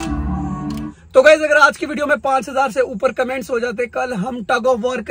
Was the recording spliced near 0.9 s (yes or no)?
yes